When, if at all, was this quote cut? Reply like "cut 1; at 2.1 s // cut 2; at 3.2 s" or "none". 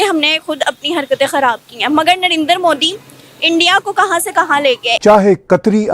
cut 1; at 5.0 s